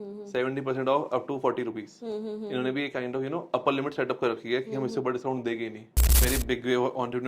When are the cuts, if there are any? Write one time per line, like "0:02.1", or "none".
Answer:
0:06.2

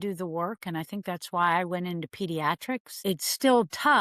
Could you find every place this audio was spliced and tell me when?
0:03.0

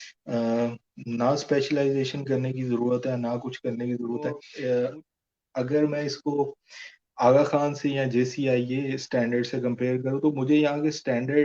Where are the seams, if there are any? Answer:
0:04.5

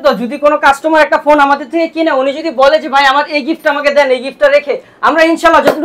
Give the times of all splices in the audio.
none

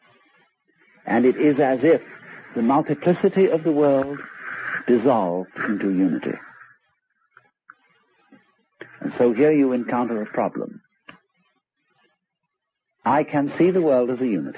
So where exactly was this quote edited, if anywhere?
none

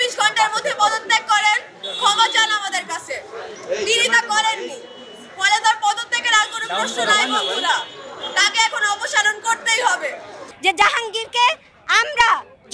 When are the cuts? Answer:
0:10.4

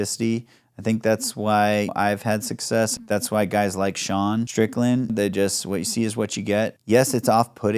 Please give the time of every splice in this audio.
0:01.9
0:03.0
0:05.0
0:06.8

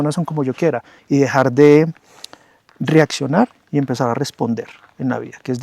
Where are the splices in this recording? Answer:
0:00.9

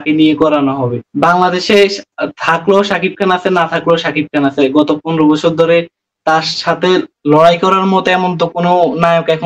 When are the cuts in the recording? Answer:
none

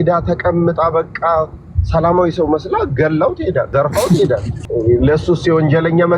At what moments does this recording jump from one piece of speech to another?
0:03.7
0:04.6

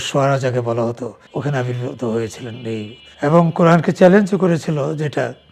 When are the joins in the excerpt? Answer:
0:01.2
0:03.0

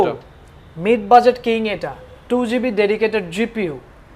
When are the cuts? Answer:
none

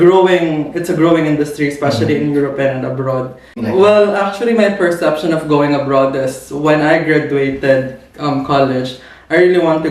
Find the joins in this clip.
0:03.6

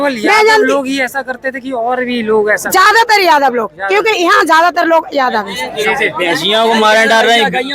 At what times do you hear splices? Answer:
0:05.6

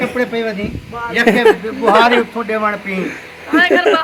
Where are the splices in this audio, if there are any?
none

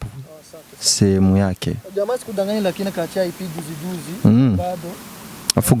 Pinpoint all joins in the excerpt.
none

